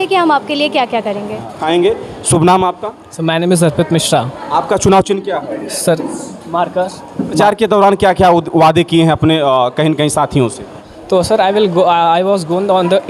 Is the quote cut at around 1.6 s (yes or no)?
yes